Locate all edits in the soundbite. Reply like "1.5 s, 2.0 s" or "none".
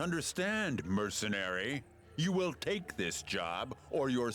1.9 s

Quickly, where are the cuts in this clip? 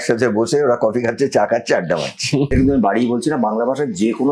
2.5 s

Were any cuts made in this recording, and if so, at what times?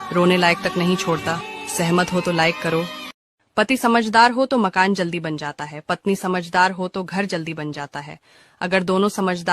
3.3 s

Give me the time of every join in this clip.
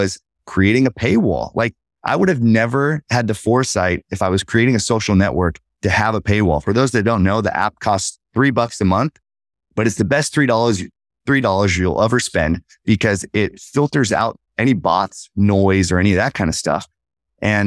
none

